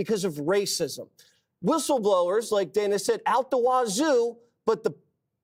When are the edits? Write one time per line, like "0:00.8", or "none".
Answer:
none

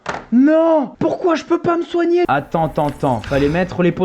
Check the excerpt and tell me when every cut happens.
0:02.3

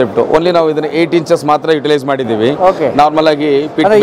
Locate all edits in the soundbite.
none

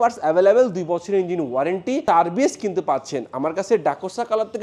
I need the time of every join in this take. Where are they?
none

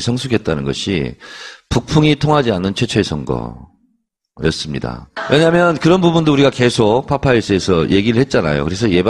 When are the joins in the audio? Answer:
0:04.4

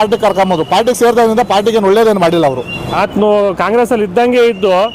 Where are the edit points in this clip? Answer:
0:02.8

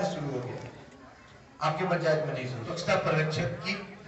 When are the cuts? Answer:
0:02.7

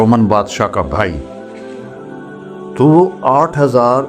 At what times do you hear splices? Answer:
none

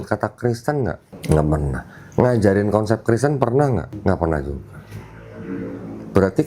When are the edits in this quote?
0:01.1
0:04.0

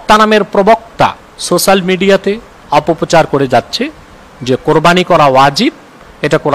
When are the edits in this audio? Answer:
0:01.3
0:02.5

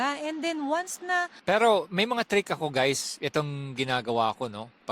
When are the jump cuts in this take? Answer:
0:01.3

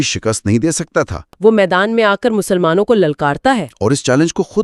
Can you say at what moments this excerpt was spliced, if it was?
0:01.2

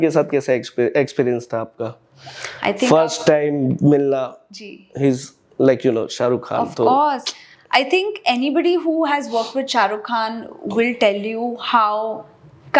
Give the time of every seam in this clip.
none

